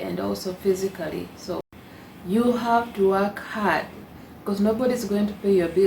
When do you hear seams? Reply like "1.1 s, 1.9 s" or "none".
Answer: 1.6 s